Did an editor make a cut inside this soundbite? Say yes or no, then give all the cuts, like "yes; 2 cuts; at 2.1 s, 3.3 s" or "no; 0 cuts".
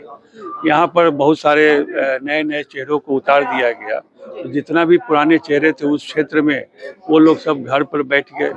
no; 0 cuts